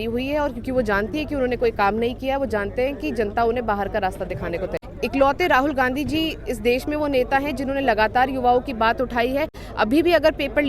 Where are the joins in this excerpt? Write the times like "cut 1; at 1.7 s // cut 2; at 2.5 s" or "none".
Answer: cut 1; at 4.7 s